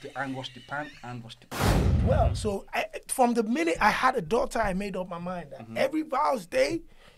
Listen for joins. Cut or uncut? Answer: cut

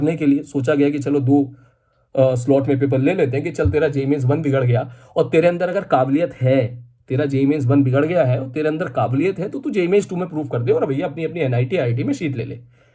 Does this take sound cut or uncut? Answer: uncut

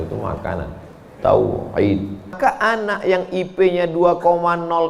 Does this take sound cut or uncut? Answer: cut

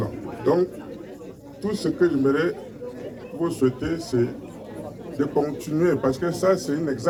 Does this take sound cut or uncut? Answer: uncut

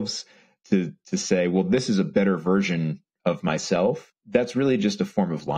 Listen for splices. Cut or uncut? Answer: cut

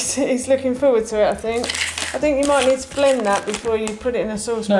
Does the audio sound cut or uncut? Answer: uncut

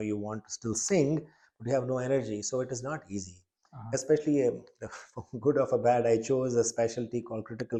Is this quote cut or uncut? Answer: uncut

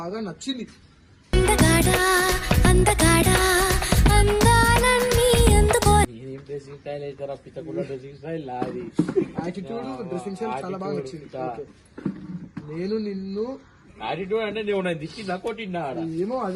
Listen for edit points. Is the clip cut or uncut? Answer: uncut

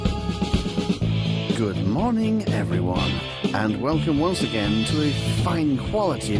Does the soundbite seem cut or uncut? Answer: uncut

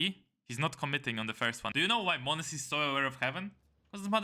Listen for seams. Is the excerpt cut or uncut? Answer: cut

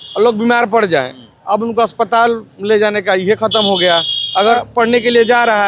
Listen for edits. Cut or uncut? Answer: cut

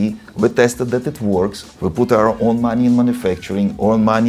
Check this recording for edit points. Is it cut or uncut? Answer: uncut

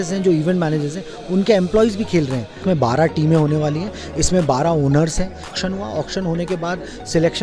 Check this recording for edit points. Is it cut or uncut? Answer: cut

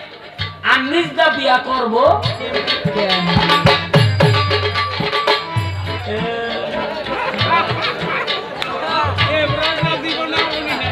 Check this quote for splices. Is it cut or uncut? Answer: uncut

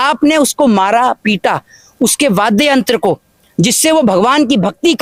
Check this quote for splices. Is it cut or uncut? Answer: uncut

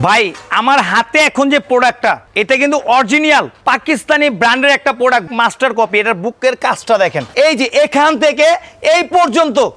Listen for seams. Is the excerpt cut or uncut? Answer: cut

